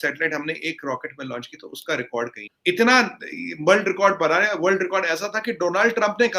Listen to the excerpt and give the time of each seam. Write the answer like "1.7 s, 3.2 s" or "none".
2.5 s